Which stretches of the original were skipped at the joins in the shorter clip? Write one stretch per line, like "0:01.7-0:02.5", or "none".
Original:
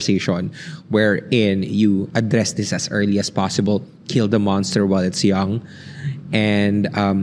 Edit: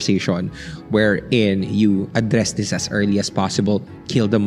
none